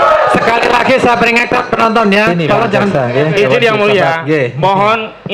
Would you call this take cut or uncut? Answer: cut